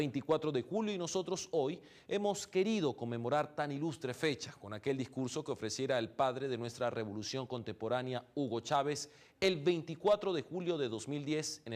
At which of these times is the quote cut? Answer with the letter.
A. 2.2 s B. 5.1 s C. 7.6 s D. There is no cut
B